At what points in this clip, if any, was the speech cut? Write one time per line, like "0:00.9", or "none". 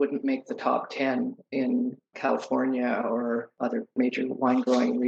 0:02.1
0:03.5